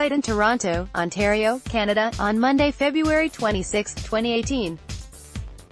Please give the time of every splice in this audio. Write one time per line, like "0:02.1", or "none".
0:04.8